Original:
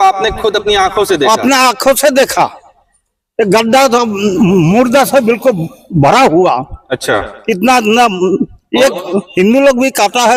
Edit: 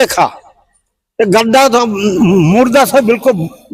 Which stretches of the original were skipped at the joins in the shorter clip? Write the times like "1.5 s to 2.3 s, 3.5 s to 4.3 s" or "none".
none